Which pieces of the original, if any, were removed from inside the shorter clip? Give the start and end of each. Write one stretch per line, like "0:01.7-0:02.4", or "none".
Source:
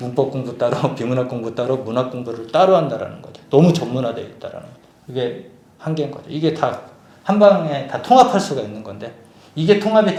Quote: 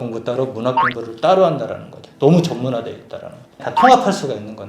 0:04.9-0:07.9